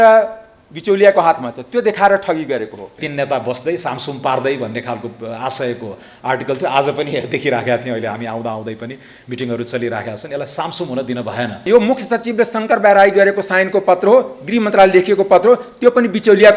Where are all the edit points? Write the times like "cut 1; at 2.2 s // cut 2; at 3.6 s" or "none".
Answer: cut 1; at 3.0 s // cut 2; at 11.6 s